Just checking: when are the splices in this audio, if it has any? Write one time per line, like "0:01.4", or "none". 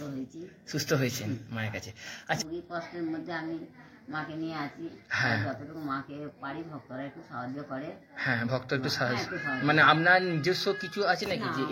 0:02.4